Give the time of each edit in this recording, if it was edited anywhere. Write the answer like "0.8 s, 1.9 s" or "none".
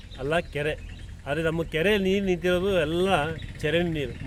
none